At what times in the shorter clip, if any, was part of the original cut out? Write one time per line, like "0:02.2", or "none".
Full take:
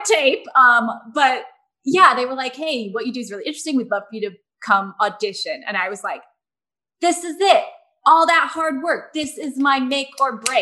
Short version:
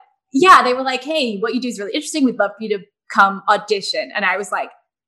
none